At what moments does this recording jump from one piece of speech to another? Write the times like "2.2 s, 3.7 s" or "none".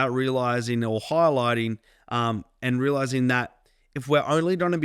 none